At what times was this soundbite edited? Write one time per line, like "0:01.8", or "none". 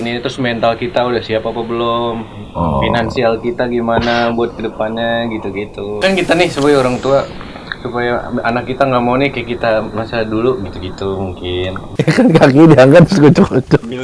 0:06.0
0:11.8